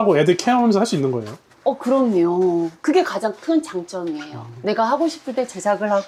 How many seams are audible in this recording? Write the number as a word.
zero